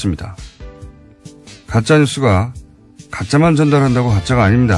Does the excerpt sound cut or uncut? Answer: cut